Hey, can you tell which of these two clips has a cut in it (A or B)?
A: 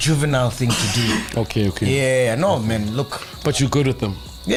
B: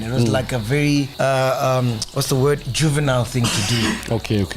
B